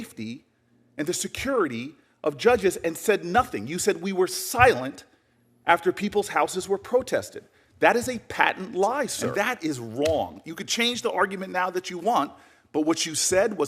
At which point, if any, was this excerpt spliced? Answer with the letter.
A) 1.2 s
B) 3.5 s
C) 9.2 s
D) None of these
C